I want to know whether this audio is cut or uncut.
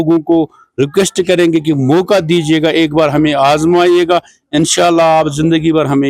uncut